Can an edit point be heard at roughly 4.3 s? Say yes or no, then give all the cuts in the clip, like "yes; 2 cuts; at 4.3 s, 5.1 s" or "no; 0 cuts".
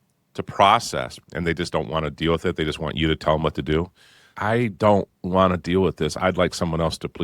yes; 2 cuts; at 1.2 s, 4.3 s